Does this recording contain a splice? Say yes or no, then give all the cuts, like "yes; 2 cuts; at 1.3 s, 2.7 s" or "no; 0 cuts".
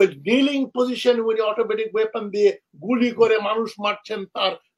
no; 0 cuts